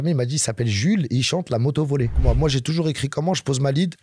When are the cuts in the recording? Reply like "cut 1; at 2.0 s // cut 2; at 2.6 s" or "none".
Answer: cut 1; at 2.2 s